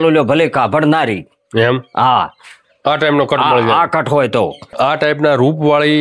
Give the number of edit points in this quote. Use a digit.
1